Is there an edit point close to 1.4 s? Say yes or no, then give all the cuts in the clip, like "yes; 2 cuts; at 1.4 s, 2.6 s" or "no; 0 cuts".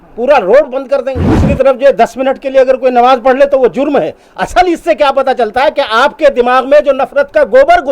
yes; 1 cut; at 1.4 s